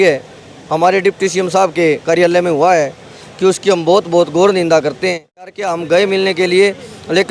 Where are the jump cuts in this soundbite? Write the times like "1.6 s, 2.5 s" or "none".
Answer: 5.5 s